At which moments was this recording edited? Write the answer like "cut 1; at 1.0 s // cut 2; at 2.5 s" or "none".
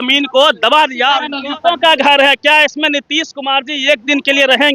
cut 1; at 1.3 s